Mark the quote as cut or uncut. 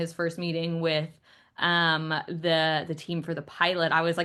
uncut